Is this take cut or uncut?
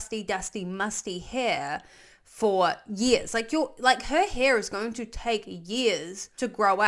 uncut